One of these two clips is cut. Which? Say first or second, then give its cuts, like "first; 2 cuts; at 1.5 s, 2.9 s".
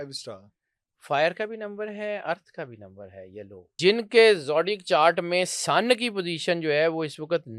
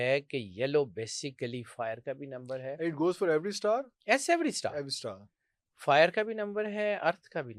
first; 1 cut; at 3.8 s